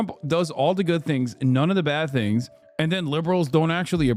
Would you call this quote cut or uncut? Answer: uncut